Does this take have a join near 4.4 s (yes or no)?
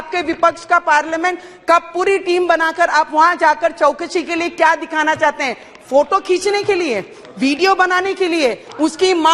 no